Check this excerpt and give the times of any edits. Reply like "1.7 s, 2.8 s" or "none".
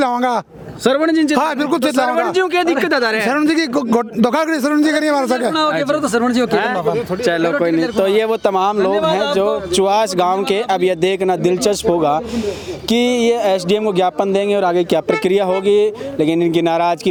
none